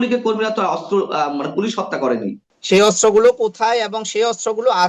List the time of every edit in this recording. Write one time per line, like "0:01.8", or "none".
0:02.5